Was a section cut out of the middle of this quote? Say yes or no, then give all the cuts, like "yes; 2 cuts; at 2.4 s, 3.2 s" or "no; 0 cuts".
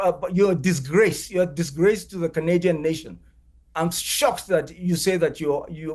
no; 0 cuts